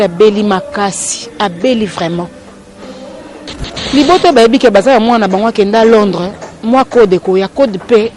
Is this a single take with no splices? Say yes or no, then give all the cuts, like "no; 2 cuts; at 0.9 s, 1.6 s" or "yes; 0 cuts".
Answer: no; 1 cut; at 3.8 s